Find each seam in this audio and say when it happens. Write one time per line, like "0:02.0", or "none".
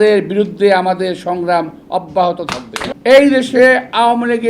0:02.9